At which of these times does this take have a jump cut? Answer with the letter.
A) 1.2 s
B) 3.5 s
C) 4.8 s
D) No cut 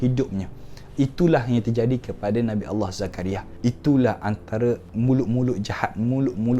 B